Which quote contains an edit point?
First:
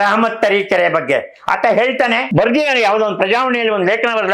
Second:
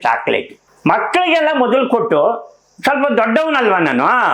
first; 1 cut; at 2.3 s

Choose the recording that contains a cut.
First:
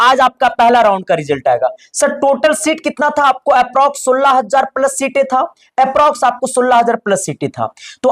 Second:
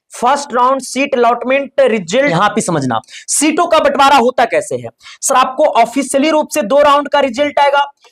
second; 1 cut; at 2.3 s

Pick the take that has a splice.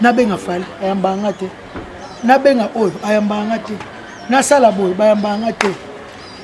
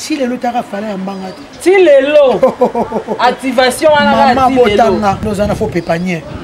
second; 1 cut; at 5.2 s

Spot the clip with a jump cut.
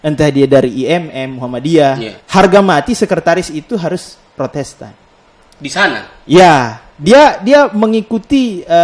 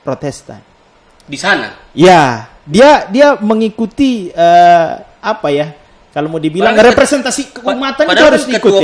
first; 1 cut; at 2.1 s

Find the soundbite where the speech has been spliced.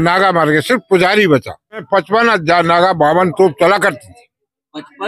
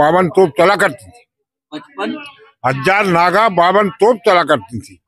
first; 1 cut; at 1.8 s

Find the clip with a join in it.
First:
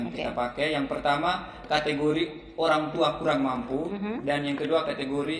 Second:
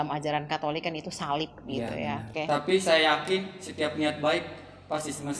second; 1 cut; at 2.3 s

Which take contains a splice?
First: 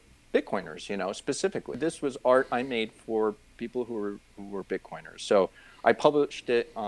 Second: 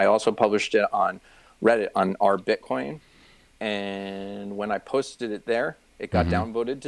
first; 1 cut; at 1.7 s

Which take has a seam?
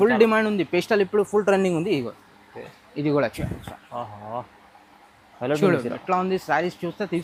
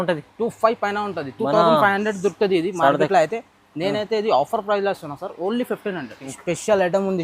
second; 1 cut; at 6.3 s

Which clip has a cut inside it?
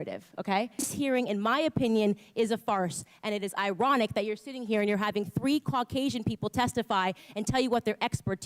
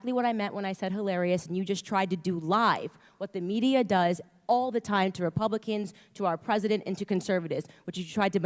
first; 1 cut; at 0.9 s

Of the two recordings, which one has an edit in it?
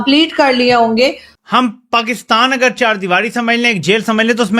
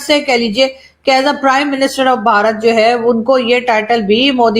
first; 1 cut; at 1.3 s

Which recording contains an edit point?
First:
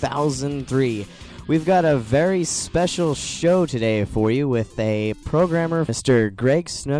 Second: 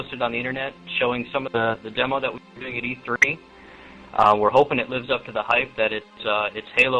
first; 1 cut; at 5.9 s

